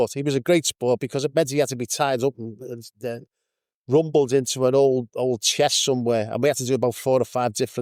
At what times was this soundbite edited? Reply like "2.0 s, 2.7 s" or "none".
none